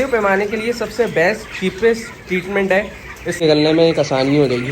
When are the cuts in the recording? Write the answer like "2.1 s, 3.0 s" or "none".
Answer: 3.4 s